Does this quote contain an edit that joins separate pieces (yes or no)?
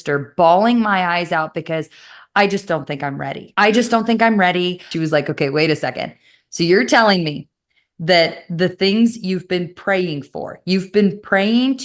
yes